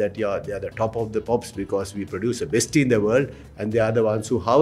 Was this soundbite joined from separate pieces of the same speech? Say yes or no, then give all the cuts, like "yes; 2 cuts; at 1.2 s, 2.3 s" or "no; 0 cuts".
no; 0 cuts